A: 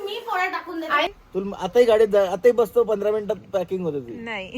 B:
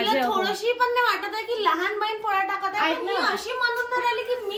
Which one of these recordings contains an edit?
A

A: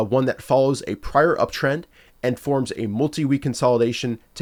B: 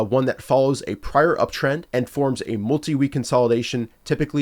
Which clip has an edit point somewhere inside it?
B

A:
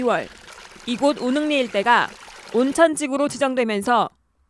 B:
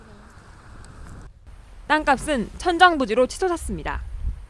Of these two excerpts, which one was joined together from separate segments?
B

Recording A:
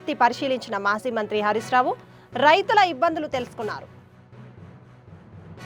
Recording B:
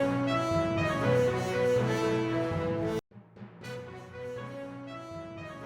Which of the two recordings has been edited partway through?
B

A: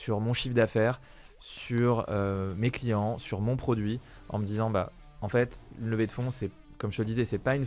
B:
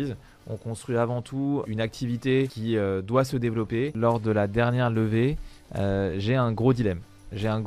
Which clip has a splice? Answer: B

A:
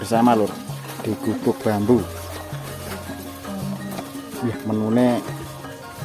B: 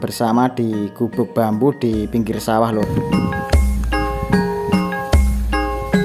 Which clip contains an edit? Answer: B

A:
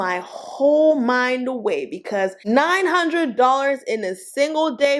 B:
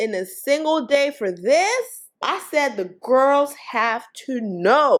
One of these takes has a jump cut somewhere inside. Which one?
A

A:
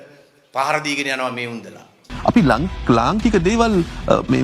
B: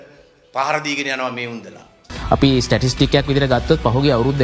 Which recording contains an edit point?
A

